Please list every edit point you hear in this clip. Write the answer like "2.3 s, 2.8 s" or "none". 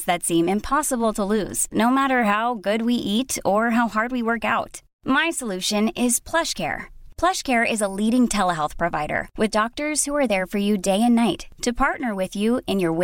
none